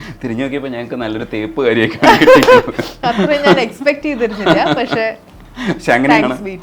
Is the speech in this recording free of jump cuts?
yes; 0 cuts

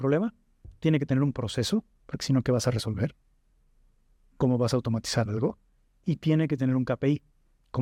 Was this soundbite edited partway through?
no; 0 cuts

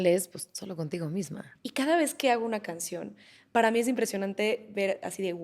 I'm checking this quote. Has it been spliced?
yes; 1 cut; at 1.4 s

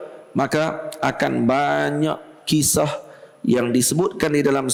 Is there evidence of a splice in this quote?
no; 0 cuts

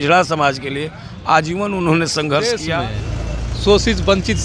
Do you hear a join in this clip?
yes; 1 cut; at 2.8 s

